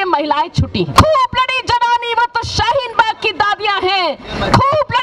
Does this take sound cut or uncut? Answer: cut